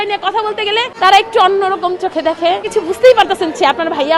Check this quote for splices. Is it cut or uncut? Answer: cut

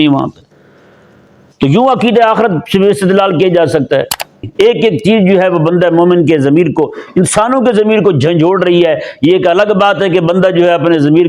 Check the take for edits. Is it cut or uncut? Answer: cut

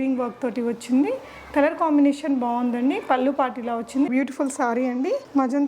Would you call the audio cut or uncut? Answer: cut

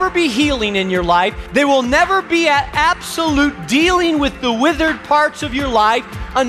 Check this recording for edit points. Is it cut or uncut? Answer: cut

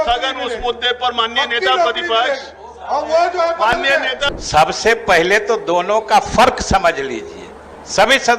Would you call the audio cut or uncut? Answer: cut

